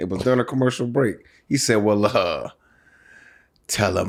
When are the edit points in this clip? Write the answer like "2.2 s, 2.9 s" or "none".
none